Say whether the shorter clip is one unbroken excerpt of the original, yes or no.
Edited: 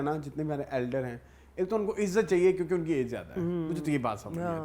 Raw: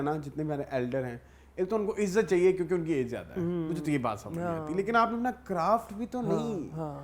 yes